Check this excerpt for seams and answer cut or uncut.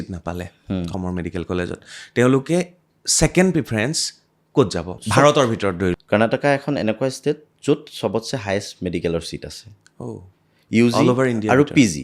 cut